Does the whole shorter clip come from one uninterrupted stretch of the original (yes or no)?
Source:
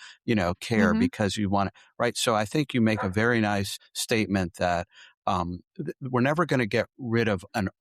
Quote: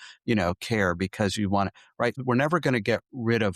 no